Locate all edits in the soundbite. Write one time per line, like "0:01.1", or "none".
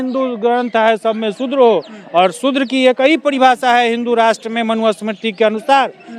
none